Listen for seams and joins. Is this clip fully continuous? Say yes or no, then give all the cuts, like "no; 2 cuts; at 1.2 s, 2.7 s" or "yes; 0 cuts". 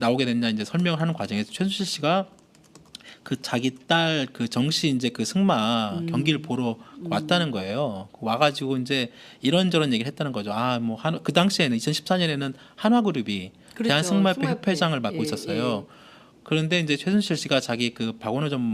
no; 1 cut; at 8.6 s